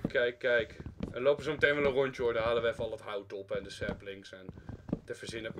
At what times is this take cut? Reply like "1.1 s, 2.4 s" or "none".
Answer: none